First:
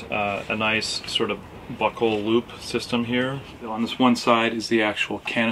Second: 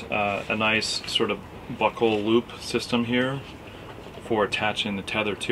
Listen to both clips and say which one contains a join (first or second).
first